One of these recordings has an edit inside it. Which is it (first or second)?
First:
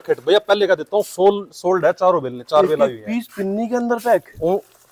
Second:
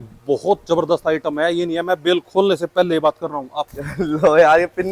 second